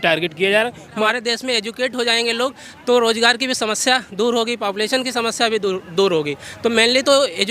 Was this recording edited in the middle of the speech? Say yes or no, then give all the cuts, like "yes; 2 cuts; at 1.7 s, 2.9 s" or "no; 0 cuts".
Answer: yes; 1 cut; at 1.0 s